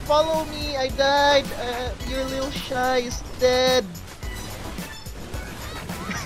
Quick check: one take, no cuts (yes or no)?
yes